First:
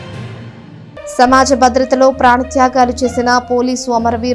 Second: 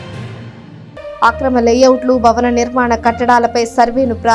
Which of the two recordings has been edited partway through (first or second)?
first